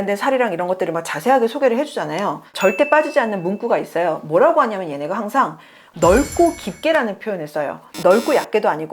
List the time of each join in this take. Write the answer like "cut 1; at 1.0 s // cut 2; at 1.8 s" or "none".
cut 1; at 7.9 s